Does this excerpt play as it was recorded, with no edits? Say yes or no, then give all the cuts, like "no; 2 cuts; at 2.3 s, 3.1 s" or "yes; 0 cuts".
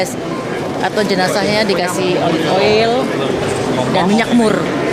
yes; 0 cuts